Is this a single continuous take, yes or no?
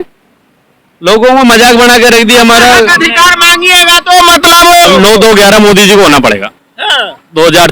no